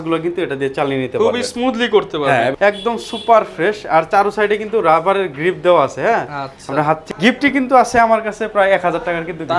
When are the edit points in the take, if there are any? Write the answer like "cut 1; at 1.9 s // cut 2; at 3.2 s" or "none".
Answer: cut 1; at 2.5 s // cut 2; at 7.1 s

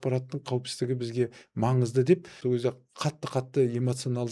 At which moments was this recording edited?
cut 1; at 2.4 s

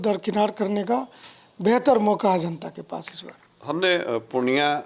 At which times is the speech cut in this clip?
none

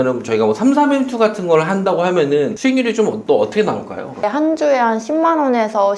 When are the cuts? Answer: cut 1; at 4.2 s

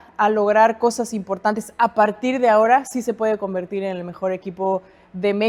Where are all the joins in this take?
none

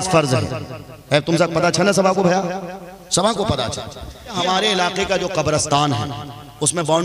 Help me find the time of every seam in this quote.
cut 1; at 4.4 s

